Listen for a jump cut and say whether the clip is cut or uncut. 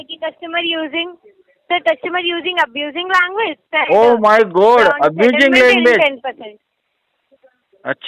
uncut